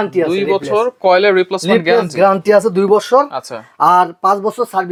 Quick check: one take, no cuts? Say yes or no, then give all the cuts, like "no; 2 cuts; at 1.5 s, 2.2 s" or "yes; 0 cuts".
yes; 0 cuts